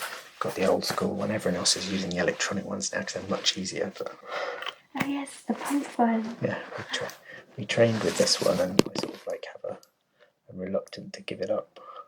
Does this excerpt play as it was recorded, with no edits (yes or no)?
no